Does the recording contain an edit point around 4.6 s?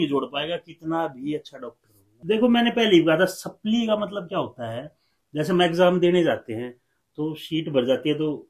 no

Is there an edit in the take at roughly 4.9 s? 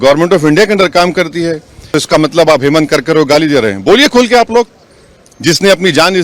no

